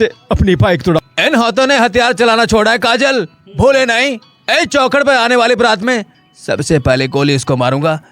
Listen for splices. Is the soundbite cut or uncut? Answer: cut